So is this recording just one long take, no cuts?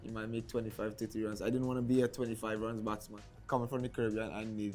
no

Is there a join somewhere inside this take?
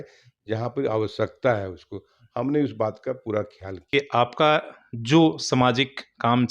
yes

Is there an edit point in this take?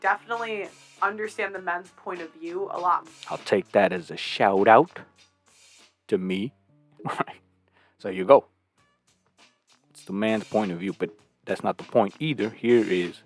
no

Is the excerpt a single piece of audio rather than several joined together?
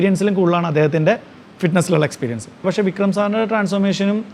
no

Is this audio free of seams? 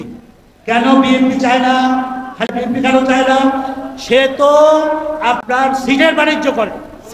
no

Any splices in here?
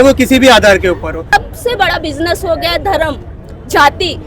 yes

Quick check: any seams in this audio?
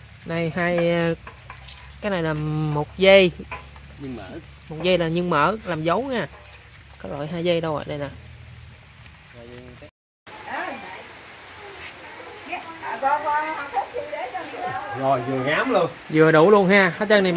yes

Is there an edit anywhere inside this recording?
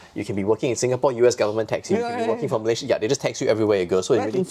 no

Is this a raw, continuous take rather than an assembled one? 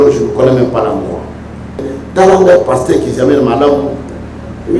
no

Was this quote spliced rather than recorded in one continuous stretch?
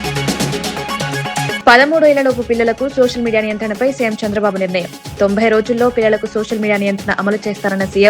yes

